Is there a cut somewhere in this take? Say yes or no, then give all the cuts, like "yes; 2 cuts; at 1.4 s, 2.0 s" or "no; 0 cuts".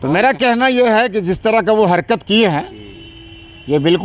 no; 0 cuts